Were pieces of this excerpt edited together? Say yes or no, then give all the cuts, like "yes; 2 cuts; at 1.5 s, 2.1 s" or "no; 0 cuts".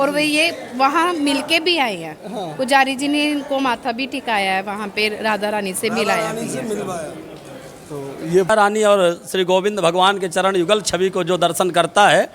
yes; 1 cut; at 8.5 s